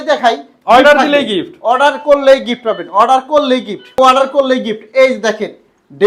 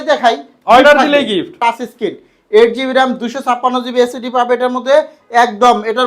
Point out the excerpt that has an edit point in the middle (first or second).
second